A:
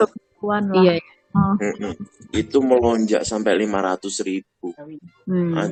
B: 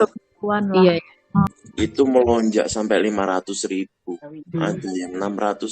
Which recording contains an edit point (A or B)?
B